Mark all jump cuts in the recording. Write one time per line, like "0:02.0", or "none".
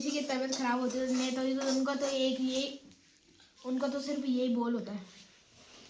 none